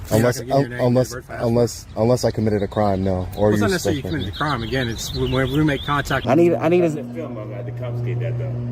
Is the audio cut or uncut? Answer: cut